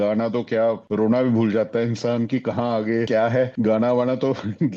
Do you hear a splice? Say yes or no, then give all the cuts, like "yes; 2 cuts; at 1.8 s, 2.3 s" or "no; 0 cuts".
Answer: no; 0 cuts